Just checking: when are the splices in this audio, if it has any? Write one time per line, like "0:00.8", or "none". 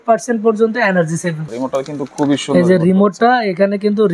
0:01.5